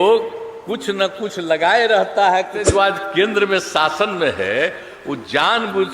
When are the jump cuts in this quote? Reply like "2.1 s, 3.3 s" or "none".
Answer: 2.6 s